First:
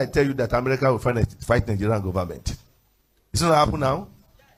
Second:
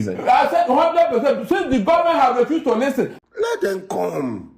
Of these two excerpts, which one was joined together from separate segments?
second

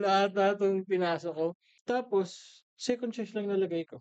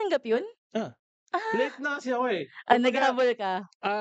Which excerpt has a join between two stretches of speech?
first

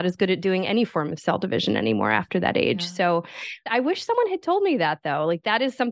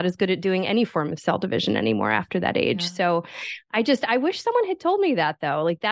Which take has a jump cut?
first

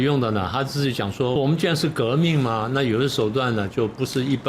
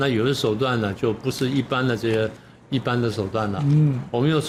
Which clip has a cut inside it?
first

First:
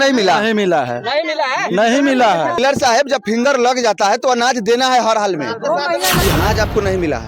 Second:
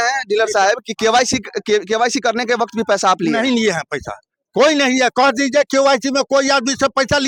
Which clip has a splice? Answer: first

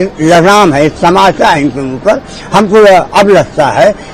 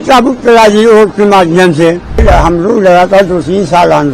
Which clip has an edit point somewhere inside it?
second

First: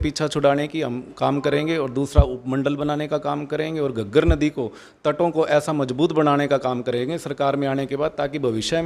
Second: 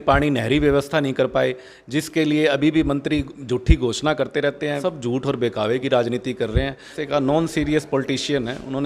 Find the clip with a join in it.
second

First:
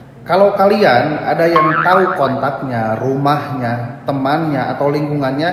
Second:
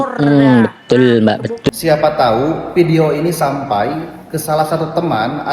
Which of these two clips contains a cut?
second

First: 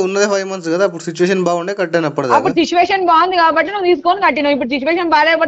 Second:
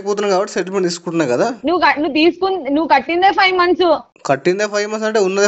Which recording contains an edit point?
second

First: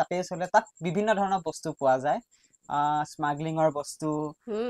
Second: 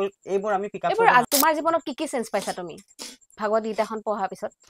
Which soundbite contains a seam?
second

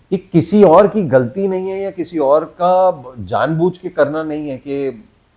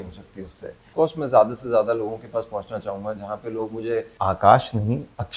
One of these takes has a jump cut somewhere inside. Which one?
second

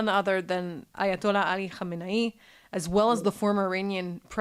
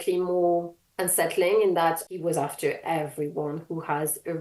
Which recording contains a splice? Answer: second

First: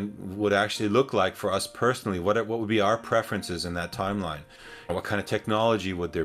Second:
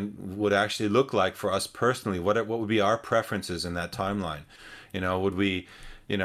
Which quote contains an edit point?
first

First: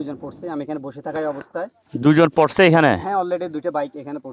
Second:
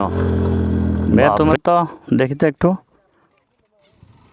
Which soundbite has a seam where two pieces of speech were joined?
second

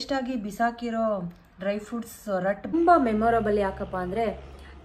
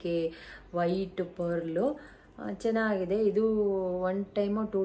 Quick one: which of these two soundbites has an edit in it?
first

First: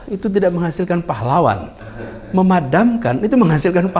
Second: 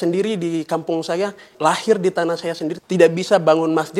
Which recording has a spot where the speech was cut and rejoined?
second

